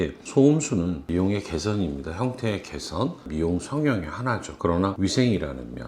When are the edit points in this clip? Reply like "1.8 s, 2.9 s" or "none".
1.0 s, 3.2 s